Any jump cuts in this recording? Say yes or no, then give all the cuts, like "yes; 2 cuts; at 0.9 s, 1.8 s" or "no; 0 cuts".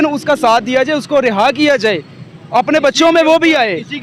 no; 0 cuts